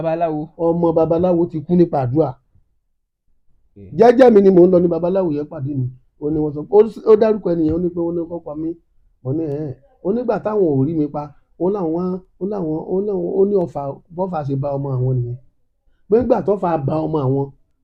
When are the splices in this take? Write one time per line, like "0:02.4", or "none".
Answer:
none